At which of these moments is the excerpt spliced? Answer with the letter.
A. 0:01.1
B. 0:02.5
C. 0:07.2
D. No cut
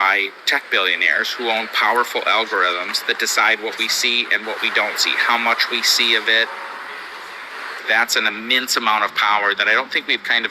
C